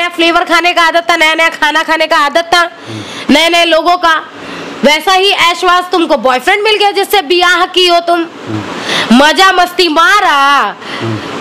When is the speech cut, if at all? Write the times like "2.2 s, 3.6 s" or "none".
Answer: none